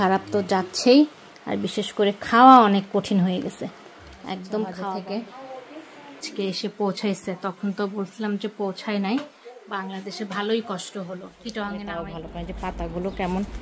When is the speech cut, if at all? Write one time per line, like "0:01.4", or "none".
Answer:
0:04.9
0:12.0